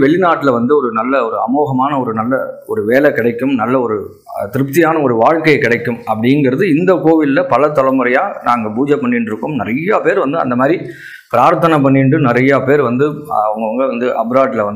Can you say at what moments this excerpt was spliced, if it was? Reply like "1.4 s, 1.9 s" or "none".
none